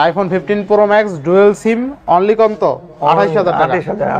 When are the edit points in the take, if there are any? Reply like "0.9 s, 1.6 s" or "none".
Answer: none